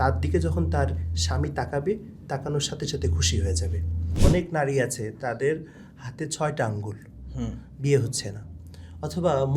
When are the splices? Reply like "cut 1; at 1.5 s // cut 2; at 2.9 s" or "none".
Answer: cut 1; at 4.1 s